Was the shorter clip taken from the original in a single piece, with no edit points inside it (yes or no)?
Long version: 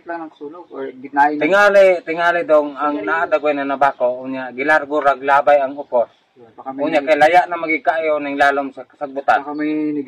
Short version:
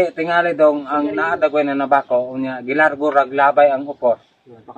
yes